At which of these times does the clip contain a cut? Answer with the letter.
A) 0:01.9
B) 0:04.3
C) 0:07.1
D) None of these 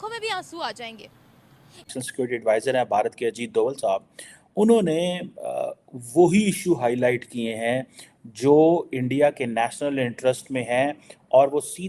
A